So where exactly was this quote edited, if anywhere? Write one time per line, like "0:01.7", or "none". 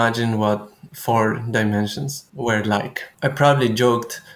0:02.0
0:03.0